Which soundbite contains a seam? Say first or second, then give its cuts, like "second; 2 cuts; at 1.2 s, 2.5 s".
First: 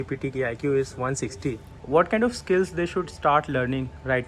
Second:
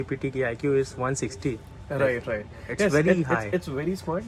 first; 1 cut; at 1.7 s